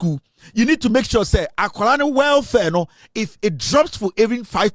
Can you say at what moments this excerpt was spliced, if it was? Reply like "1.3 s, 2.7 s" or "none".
none

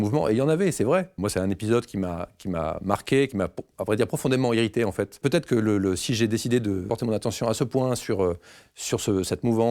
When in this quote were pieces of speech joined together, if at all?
1.2 s, 5.2 s, 6.9 s

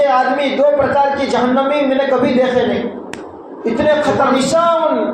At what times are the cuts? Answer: 4.2 s

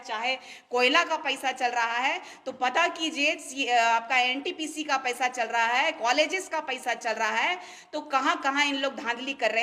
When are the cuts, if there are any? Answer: none

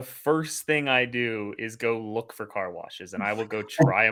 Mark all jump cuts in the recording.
none

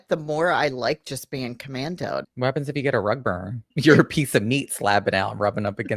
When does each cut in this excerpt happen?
2.3 s, 3.7 s

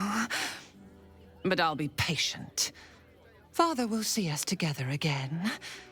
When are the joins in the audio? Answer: none

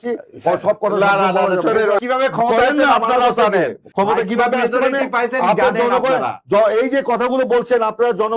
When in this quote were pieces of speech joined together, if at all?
2.0 s, 3.8 s

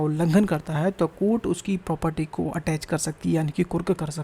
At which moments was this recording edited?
none

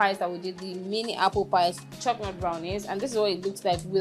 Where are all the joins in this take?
1.9 s

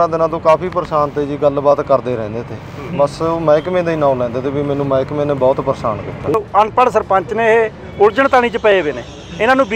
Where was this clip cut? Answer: 6.3 s

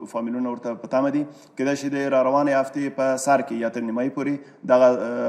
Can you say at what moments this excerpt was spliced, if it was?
none

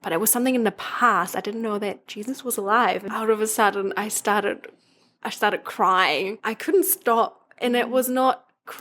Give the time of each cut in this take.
3.0 s, 6.4 s

